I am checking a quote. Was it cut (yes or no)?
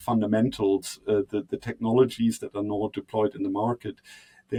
no